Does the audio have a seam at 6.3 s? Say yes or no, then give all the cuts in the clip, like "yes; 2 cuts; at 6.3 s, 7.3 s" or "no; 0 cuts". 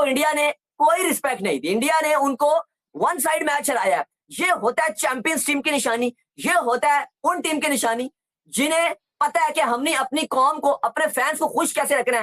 no; 0 cuts